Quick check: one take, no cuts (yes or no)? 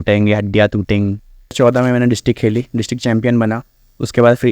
no